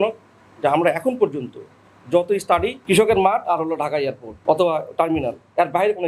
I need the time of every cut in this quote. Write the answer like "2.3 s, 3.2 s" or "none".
2.8 s, 4.3 s